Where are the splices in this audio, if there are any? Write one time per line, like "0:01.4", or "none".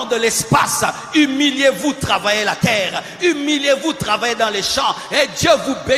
none